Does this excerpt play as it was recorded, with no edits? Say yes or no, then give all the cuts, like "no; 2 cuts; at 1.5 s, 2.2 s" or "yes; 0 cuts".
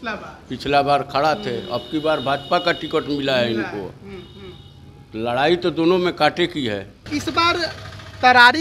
no; 1 cut; at 7.1 s